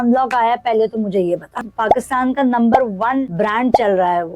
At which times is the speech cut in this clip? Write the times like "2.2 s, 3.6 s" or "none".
1.7 s, 3.3 s

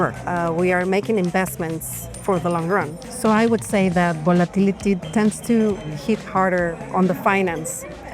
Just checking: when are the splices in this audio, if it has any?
3.0 s, 5.0 s

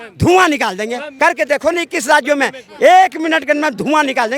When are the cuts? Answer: 1.1 s

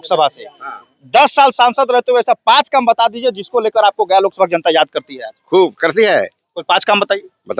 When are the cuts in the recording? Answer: none

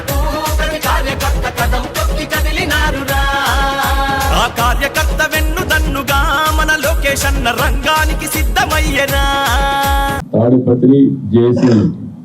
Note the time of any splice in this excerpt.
10.3 s

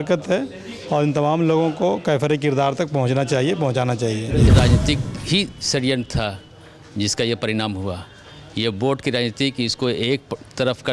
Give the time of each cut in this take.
4.5 s

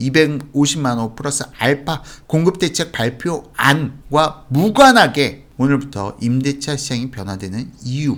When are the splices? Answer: none

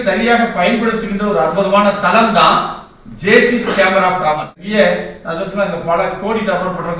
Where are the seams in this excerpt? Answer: 4.6 s

